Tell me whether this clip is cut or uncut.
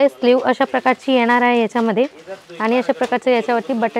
uncut